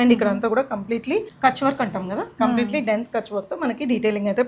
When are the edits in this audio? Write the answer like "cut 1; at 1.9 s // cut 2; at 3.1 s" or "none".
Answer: cut 1; at 1.3 s